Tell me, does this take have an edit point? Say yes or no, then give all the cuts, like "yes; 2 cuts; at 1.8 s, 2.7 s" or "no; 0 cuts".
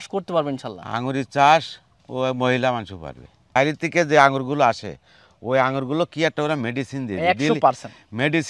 yes; 1 cut; at 3.6 s